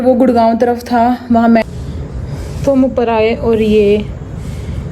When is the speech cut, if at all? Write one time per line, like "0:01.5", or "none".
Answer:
0:01.6